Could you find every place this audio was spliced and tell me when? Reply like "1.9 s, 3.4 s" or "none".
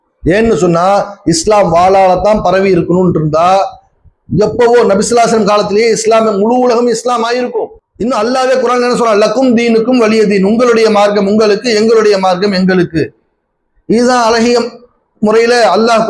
7.8 s